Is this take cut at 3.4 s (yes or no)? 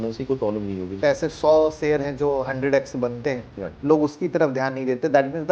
no